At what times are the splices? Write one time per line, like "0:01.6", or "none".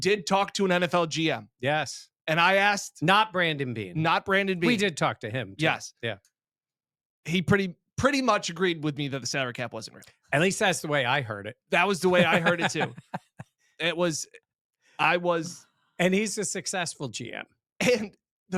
none

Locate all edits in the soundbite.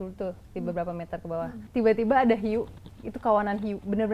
0:01.6

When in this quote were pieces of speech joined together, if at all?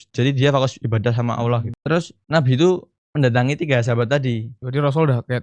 0:01.7

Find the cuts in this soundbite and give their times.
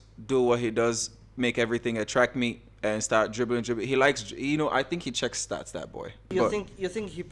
0:06.3

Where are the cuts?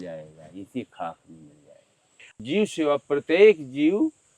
0:02.1

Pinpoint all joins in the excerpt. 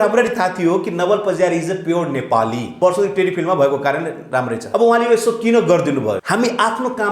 0:02.7
0:04.6
0:06.2

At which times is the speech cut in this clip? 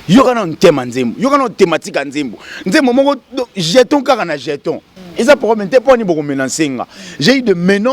0:05.0

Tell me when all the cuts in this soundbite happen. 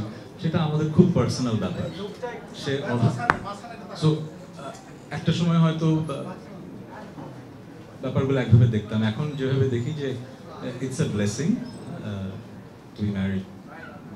none

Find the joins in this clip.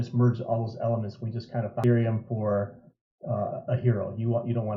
0:01.8

